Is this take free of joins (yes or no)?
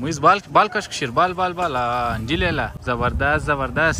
no